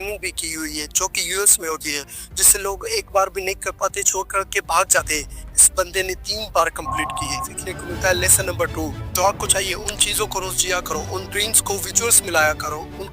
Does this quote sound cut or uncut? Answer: cut